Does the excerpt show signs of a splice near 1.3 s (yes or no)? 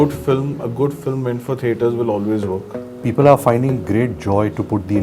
no